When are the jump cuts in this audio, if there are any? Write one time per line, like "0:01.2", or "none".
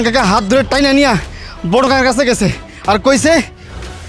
none